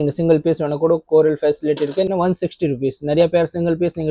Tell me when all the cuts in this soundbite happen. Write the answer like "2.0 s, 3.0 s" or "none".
2.1 s